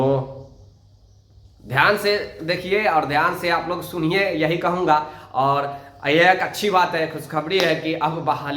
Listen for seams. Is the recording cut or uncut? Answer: uncut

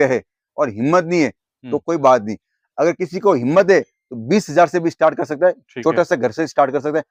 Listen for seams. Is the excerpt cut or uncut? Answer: uncut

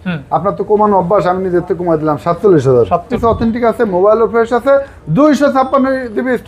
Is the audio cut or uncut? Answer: cut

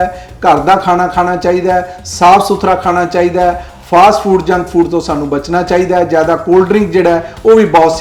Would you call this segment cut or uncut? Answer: uncut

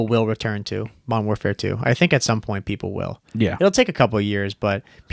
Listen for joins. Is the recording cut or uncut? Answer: uncut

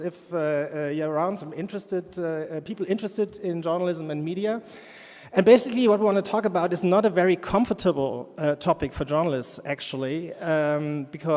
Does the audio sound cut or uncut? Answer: cut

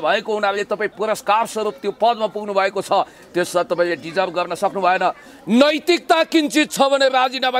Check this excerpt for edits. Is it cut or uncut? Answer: uncut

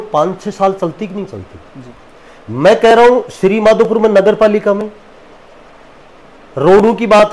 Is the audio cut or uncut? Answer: uncut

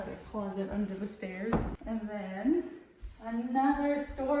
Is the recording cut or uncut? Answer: cut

